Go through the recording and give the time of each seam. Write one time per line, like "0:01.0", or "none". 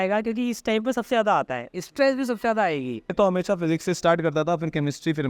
0:03.1